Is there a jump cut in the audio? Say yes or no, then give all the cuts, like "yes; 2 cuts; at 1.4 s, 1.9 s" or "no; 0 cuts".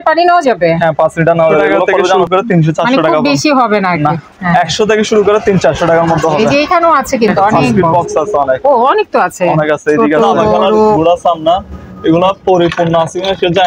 yes; 3 cuts; at 2.2 s, 7.9 s, 11.0 s